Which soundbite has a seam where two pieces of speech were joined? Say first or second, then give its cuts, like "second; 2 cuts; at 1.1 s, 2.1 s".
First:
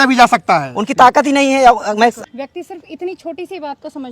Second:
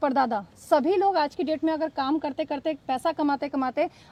first; 1 cut; at 2.2 s